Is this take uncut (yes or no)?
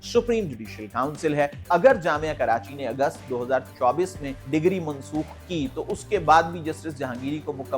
no